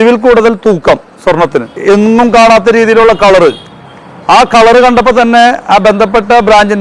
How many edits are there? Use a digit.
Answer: 1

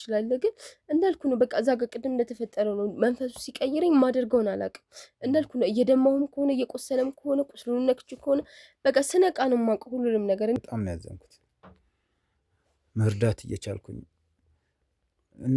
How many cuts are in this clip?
1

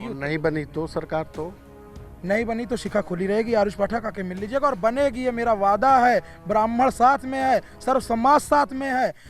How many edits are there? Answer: 0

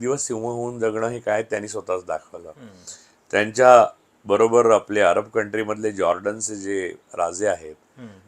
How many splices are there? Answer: 0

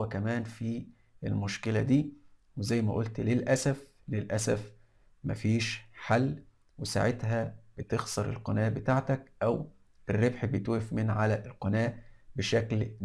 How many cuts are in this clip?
0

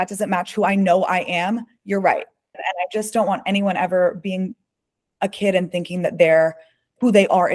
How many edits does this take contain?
1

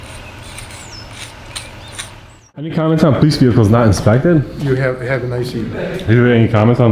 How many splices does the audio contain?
1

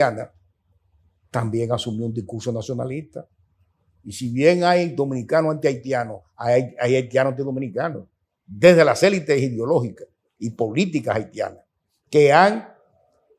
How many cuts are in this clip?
0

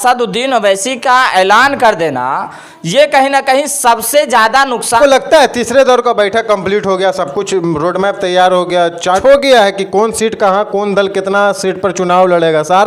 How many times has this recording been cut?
2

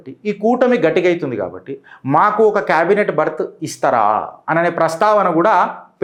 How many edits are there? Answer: 0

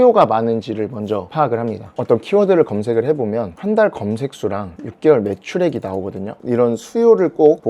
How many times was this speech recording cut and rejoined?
2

